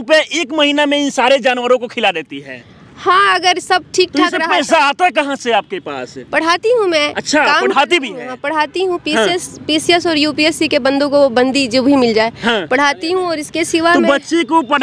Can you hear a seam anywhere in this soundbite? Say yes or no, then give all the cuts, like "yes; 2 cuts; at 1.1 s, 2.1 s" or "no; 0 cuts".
no; 0 cuts